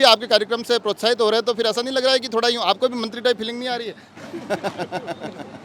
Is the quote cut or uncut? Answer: uncut